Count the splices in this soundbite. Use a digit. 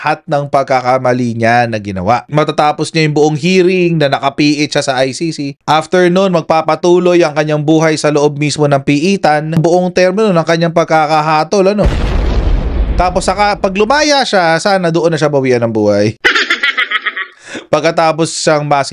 2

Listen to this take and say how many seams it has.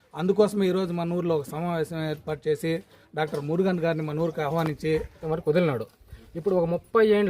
1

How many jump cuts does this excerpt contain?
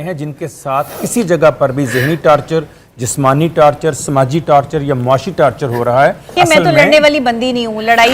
1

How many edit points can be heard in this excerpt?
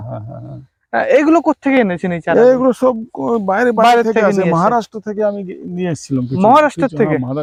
0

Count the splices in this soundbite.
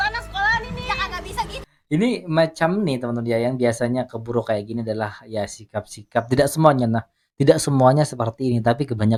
0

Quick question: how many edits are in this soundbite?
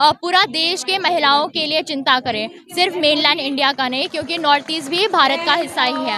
0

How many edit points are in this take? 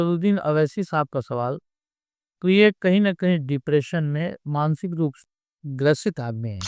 1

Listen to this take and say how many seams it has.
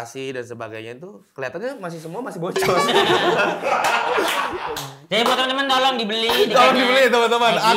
0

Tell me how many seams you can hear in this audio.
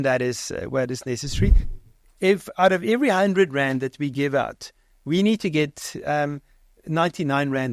1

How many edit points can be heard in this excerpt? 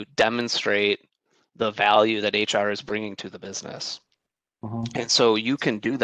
0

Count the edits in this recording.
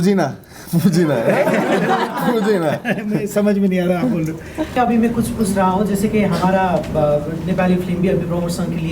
1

